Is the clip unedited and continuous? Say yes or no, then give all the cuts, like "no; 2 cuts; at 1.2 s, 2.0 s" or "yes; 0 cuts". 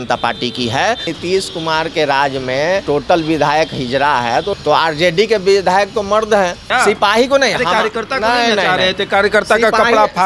no; 4 cuts; at 1.1 s, 2.8 s, 4.5 s, 6.6 s